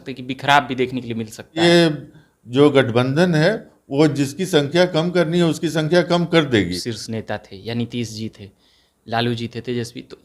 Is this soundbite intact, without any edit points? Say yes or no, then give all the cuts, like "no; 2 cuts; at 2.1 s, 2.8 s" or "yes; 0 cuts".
no; 2 cuts; at 1.6 s, 6.7 s